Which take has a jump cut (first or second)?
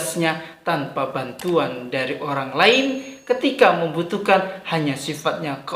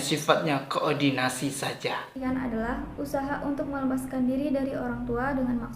second